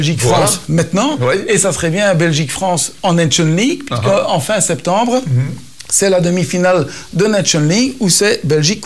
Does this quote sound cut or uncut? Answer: uncut